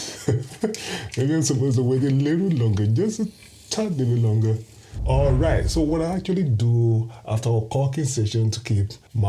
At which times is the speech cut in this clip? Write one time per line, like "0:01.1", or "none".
0:04.7